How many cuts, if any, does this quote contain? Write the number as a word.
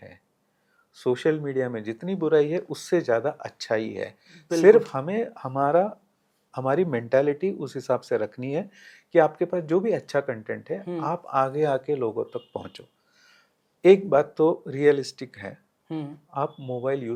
zero